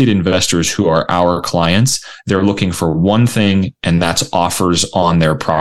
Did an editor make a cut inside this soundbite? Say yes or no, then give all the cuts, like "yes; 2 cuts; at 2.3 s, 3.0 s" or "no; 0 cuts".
no; 0 cuts